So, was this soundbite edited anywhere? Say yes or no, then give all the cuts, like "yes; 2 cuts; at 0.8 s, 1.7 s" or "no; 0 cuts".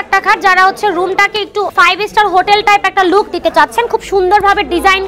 yes; 1 cut; at 1.7 s